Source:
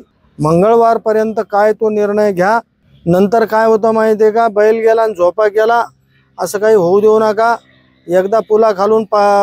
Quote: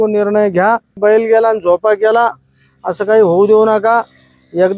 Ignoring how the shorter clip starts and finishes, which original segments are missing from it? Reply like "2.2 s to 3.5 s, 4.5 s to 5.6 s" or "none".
2.8 s to 4.5 s